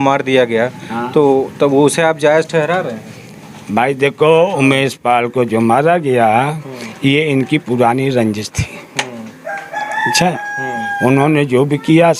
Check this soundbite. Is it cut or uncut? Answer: uncut